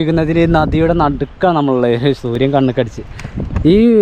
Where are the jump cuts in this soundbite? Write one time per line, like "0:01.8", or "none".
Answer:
none